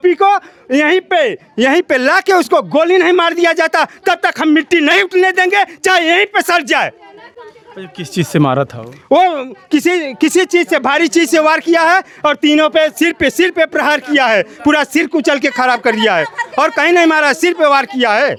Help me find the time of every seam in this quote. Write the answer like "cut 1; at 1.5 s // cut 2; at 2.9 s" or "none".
none